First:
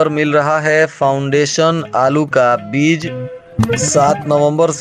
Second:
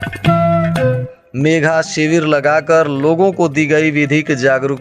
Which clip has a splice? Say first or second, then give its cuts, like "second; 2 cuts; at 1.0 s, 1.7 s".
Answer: second; 1 cut; at 1.2 s